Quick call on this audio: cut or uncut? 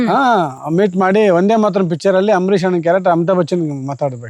uncut